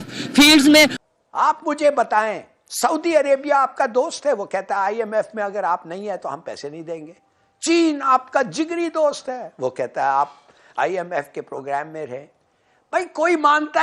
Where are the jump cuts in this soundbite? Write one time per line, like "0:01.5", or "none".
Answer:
0:01.0